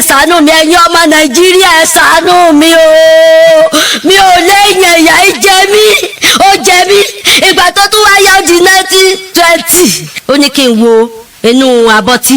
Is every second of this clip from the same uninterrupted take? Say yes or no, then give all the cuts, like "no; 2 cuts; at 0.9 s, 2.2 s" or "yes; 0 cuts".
no; 1 cut; at 10.1 s